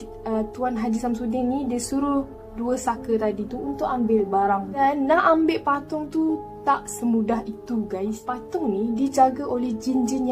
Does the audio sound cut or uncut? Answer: cut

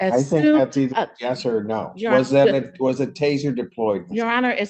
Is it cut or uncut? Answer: uncut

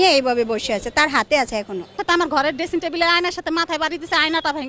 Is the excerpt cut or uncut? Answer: cut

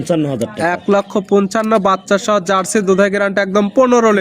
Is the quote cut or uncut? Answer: uncut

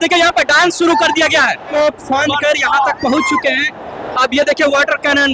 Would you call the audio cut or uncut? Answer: uncut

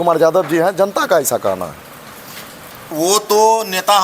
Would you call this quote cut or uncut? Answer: cut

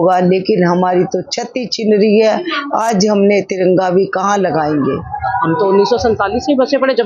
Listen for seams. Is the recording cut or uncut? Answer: cut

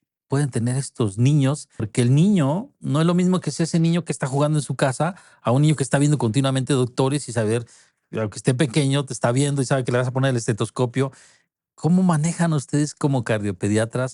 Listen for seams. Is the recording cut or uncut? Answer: cut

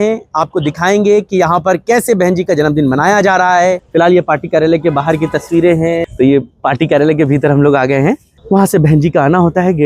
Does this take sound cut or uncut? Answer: cut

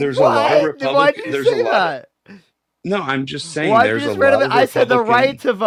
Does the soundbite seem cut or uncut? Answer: uncut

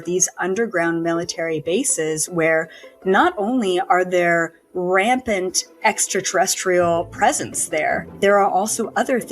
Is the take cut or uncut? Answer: cut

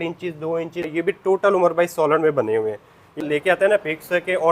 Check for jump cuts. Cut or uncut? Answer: cut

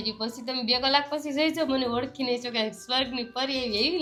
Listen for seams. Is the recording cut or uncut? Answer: uncut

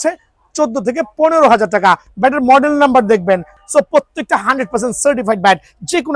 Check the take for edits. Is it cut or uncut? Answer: cut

